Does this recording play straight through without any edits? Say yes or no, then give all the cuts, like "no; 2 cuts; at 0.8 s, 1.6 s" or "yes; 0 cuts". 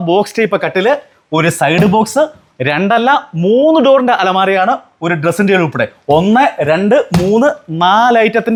yes; 0 cuts